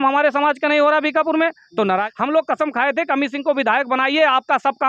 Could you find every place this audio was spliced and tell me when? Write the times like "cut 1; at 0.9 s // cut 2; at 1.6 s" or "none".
cut 1; at 2.1 s

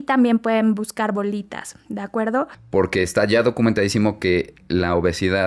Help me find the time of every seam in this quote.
cut 1; at 2.6 s

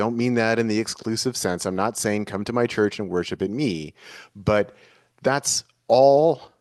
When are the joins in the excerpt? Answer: none

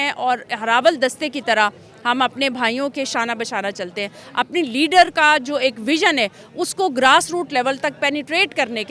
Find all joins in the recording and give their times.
none

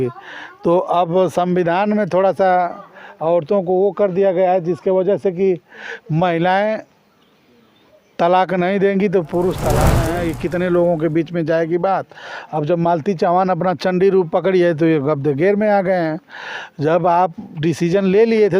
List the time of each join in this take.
cut 1; at 10.0 s

